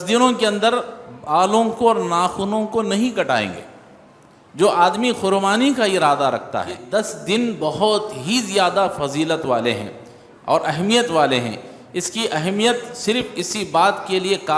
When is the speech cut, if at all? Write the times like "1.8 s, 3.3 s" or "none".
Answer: 6.8 s